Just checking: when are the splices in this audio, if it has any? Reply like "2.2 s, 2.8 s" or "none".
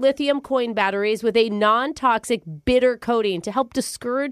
none